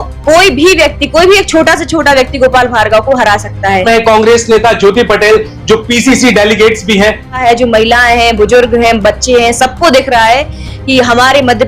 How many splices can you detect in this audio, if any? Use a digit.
2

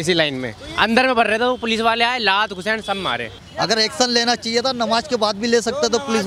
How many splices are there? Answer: 1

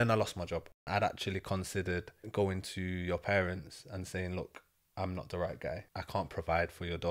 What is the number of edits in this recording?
3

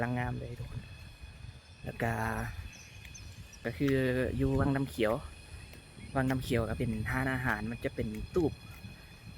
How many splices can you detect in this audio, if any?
1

